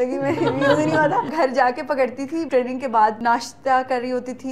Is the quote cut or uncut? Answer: cut